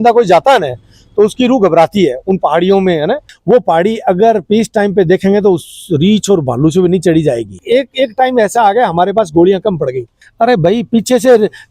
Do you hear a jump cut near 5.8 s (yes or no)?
no